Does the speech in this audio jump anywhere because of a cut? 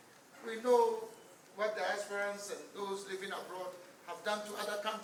no; 0 cuts

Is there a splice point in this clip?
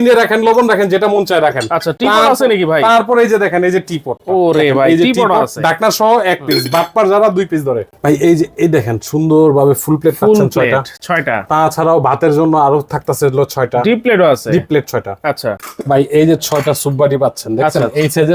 no; 0 cuts

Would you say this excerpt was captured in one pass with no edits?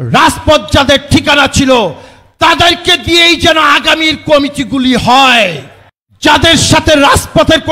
no; 1 cut; at 6.1 s

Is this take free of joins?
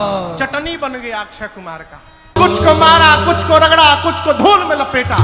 no; 1 cut; at 2.4 s

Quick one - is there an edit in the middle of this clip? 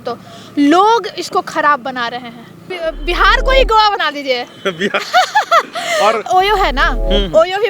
yes; 2 cuts; at 2.7 s, 6.3 s

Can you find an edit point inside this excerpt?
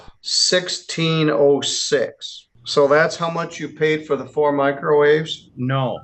no; 0 cuts

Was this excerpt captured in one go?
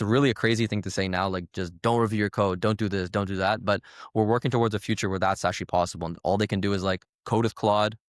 no; 1 cut; at 6.1 s

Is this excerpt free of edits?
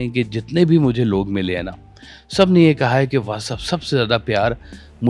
yes; 0 cuts

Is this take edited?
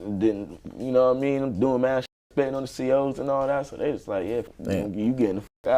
yes; 1 cut; at 4.5 s

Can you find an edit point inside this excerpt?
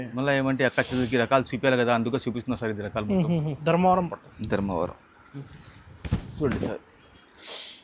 yes; 1 cut; at 3.5 s

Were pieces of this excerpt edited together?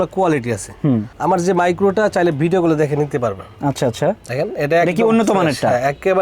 no; 0 cuts

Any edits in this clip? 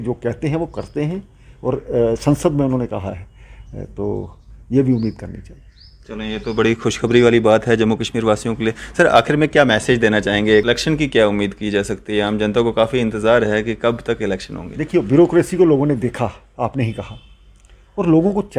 yes; 1 cut; at 10.6 s

